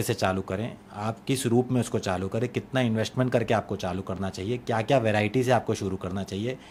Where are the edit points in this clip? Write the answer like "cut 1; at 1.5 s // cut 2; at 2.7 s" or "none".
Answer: none